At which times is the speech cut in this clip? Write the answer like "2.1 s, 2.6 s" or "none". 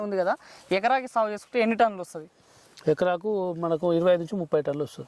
none